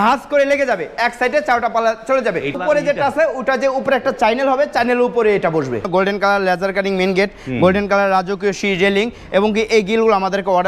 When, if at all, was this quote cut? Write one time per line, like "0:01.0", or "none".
0:02.5
0:05.9

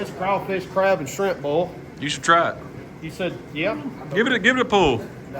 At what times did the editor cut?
0:02.8

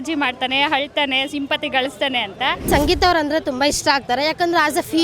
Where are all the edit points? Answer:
0:02.7

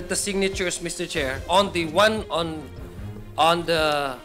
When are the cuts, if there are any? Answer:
none

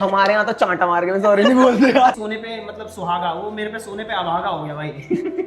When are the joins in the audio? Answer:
0:02.1

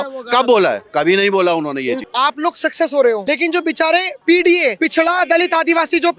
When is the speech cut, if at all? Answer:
0:02.0
0:03.2
0:04.8

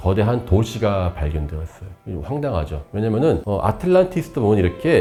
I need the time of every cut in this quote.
none

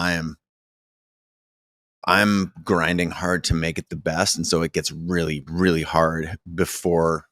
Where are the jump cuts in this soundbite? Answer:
none

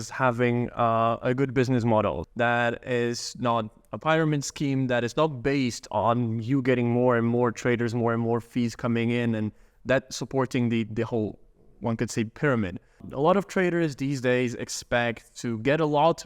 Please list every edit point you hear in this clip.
0:02.2
0:13.1

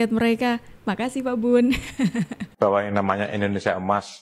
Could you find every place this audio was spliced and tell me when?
0:02.4

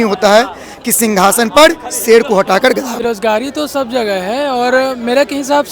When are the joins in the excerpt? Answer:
0:03.0

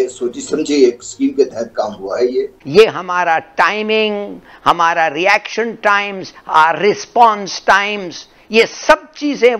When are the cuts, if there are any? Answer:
0:02.6

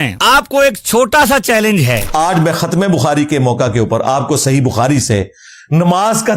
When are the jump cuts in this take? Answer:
0:02.1

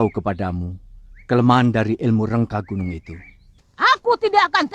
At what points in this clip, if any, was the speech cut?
0:03.5

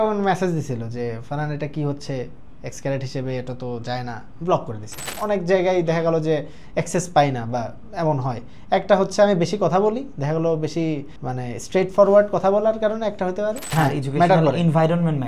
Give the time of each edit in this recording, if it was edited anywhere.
0:05.1
0:13.6

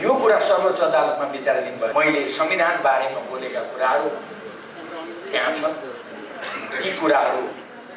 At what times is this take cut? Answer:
0:01.9

